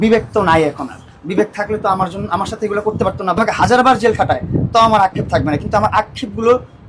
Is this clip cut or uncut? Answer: cut